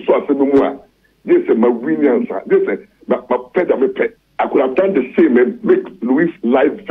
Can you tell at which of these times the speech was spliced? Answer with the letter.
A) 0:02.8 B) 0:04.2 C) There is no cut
B